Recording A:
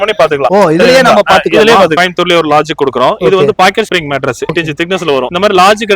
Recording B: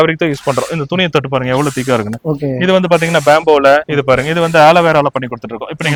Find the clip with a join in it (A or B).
A